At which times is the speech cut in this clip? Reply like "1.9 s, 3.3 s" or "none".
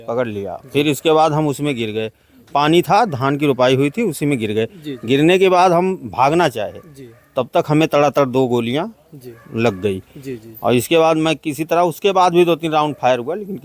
none